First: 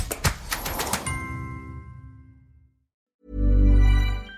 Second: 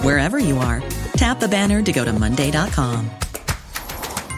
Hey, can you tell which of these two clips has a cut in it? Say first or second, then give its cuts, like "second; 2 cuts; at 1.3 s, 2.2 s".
first; 1 cut; at 3.1 s